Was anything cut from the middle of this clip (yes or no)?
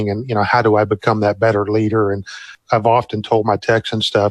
yes